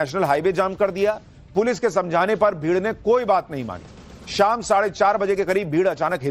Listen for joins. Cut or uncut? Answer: cut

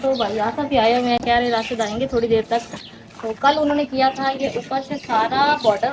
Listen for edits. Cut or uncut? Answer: uncut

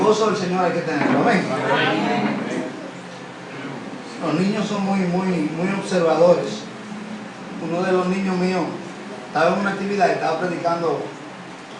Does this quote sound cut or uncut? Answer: cut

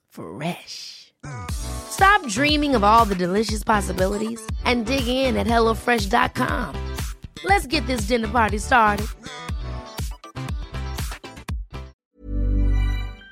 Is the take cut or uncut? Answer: cut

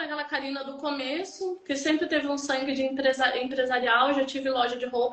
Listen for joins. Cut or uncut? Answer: uncut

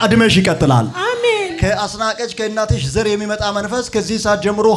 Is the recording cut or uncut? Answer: uncut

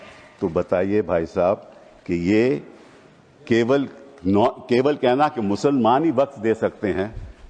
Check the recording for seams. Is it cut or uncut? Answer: uncut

